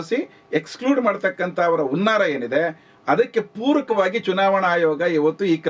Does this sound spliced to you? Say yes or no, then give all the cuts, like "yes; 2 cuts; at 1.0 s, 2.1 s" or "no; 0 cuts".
no; 0 cuts